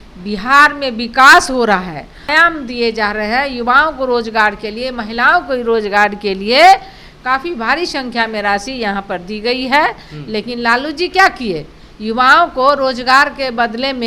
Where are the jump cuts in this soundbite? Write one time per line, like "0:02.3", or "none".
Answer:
0:02.3